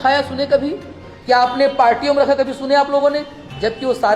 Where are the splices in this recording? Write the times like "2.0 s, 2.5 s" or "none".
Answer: none